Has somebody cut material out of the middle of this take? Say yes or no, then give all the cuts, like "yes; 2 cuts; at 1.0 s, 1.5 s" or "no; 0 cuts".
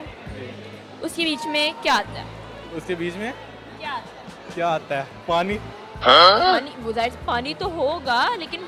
no; 0 cuts